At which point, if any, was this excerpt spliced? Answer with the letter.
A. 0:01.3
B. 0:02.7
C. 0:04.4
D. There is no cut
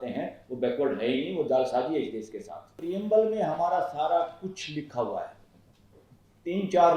B